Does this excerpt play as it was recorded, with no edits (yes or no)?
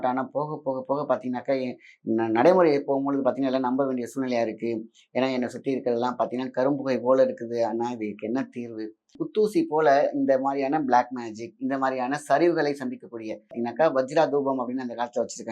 no